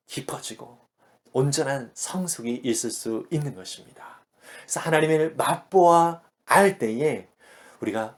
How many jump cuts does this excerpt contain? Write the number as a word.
zero